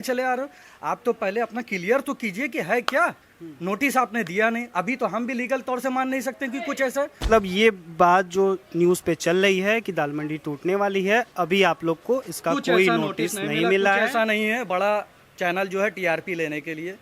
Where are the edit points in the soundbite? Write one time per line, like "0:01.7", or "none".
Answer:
0:07.3